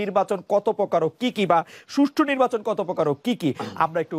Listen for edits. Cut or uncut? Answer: uncut